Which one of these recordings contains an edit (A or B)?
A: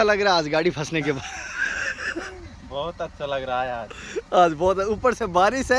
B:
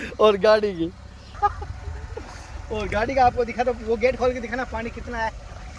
B